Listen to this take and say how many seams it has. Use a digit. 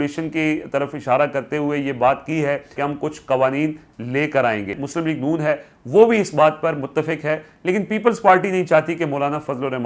2